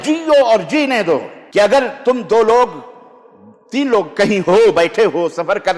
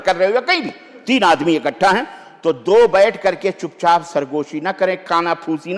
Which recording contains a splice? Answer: first; 1 cut; at 1.4 s

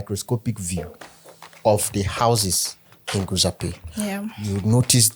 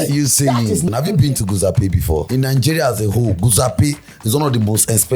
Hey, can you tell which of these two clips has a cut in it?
second; 2 cuts; at 0.9 s, 2.3 s

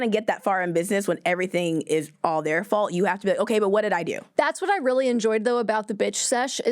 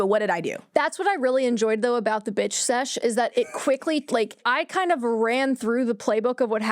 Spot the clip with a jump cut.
second; 1 cut; at 4.5 s

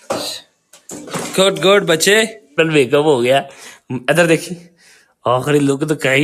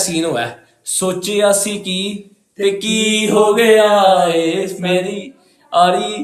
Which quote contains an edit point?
first; 1 cut; at 2.6 s

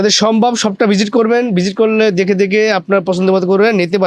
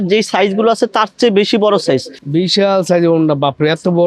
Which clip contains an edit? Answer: second; 1 cut; at 2.2 s

